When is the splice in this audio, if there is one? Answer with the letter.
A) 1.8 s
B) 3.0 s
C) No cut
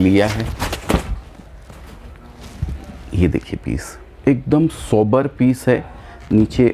C